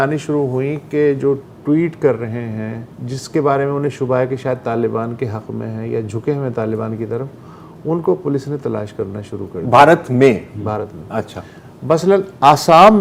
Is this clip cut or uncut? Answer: uncut